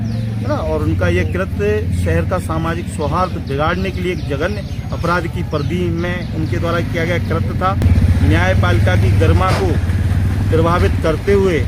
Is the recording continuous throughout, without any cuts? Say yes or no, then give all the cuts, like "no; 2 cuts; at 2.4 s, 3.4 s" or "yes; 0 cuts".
no; 1 cut; at 7.8 s